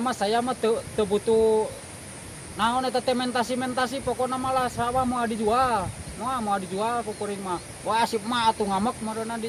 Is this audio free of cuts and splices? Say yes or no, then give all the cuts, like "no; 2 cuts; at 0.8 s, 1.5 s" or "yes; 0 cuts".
yes; 0 cuts